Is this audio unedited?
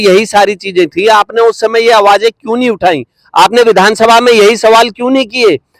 yes; 0 cuts

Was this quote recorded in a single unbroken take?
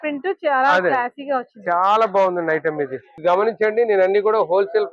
no; 1 cut; at 3.1 s

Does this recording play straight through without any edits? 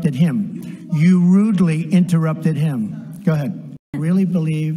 no; 1 cut; at 3.8 s

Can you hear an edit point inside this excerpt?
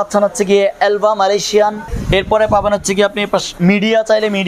yes; 2 cuts; at 1.9 s, 3.5 s

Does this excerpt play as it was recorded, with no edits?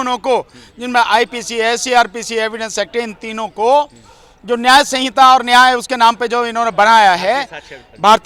yes; 0 cuts

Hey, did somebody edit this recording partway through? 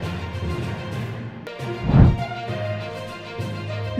yes; 1 cut; at 1.3 s

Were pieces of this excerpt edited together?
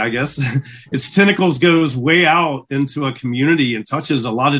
no; 0 cuts

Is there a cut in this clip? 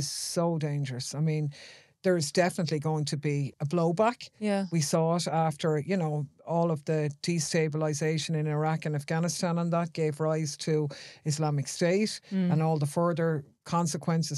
yes; 1 cut; at 3.5 s

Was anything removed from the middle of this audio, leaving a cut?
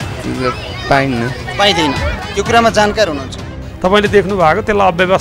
yes; 1 cut; at 3.6 s

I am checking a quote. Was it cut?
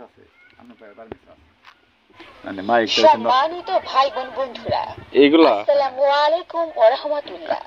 yes; 1 cut; at 2.2 s

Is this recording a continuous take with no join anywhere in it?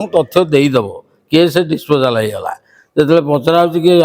yes; 0 cuts

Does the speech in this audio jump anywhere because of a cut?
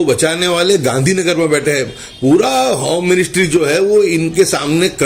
no; 0 cuts

